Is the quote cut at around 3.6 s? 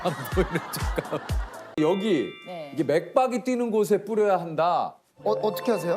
no; 1 cut; at 1.8 s

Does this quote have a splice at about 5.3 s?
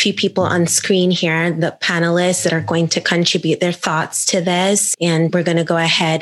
yes; 1 cut; at 5.3 s

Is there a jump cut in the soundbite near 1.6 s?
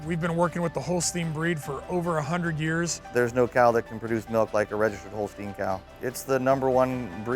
no; 2 cuts; at 3.0 s, 5.9 s

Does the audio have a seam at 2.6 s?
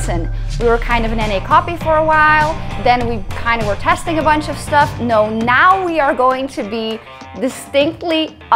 no; 0 cuts

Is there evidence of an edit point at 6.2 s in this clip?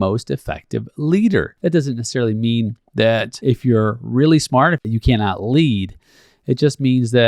no; 3 cuts; at 1.5 s, 3.3 s, 4.9 s

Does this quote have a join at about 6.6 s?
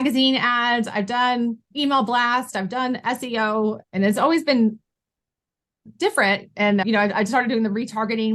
no; 2 cuts; at 1.7 s, 3.8 s

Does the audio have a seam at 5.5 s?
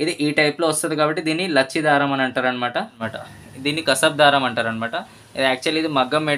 no; 1 cut; at 3.1 s

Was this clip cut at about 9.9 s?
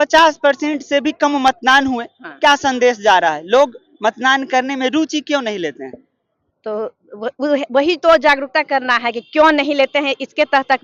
no; 0 cuts

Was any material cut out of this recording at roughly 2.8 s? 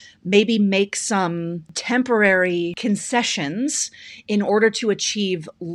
yes; 2 cuts; at 1.7 s, 2.8 s

